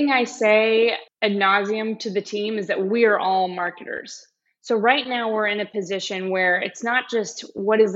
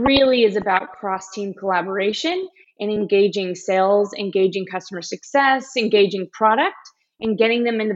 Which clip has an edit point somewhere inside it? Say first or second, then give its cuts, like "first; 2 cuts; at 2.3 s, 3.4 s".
first; 1 cut; at 1.1 s